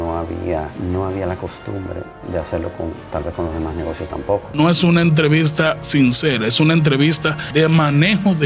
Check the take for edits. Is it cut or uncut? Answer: cut